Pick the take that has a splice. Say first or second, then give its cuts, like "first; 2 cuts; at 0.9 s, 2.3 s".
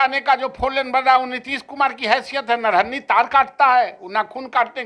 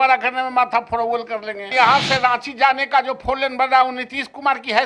second; 1 cut; at 1.7 s